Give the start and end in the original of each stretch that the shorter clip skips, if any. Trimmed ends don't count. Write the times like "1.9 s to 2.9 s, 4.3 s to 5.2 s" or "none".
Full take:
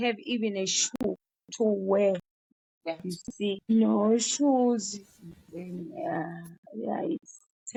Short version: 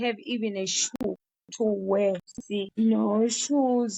2.4 s to 3.3 s